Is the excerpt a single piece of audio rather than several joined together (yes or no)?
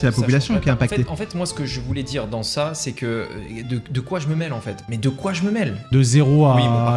no